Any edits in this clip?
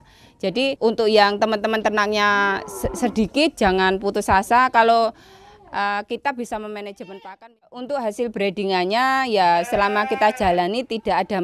yes; 1 cut; at 7.1 s

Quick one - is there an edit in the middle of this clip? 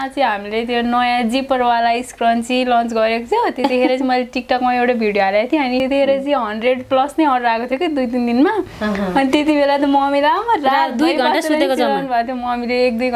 yes; 1 cut; at 5.8 s

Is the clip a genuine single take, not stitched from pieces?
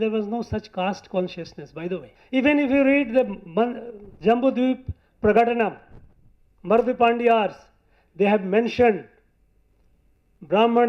no; 1 cut; at 2.1 s

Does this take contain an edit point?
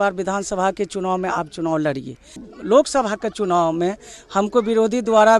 yes; 1 cut; at 2.5 s

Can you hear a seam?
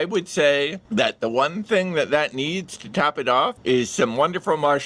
no; 0 cuts

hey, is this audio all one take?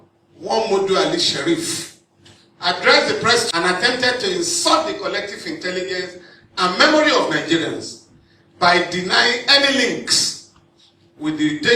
yes; 0 cuts

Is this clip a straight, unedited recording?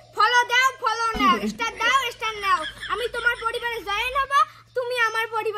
yes; 0 cuts

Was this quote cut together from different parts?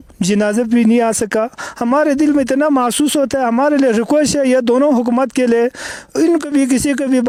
no; 0 cuts

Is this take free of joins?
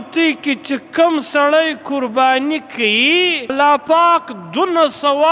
no; 1 cut; at 3.5 s

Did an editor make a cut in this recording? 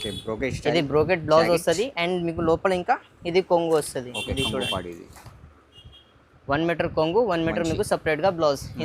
no; 0 cuts

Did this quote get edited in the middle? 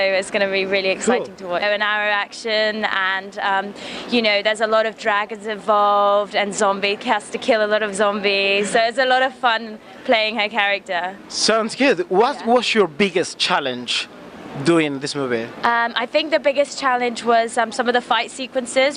no; 0 cuts

